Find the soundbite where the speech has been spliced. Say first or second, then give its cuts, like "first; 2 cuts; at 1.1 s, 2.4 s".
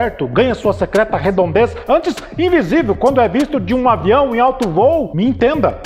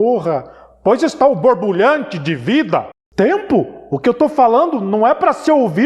second; 1 cut; at 3.0 s